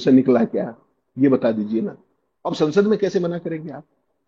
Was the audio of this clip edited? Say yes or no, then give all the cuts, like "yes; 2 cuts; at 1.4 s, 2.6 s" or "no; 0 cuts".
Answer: yes; 1 cut; at 2.5 s